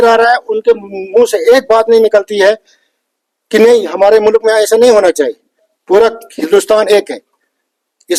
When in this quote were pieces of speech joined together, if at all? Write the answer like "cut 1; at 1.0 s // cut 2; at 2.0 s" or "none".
none